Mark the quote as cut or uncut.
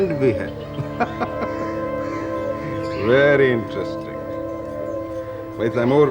uncut